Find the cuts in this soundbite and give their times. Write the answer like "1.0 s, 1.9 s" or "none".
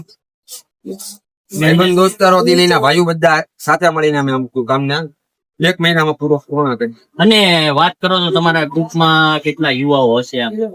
none